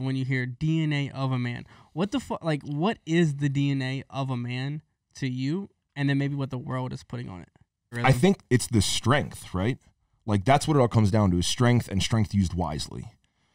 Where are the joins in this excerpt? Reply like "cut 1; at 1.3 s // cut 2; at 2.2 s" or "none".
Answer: cut 1; at 8.0 s